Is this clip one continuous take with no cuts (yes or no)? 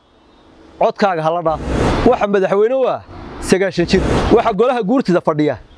no